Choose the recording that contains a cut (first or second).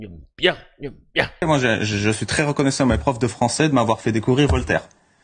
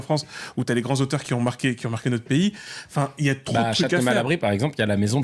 first